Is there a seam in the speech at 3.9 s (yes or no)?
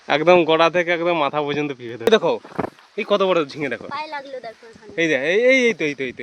no